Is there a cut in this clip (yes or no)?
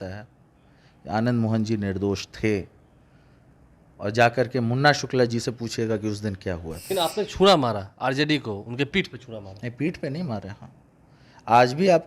yes